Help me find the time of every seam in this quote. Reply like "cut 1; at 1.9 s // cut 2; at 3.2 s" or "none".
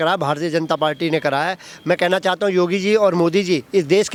none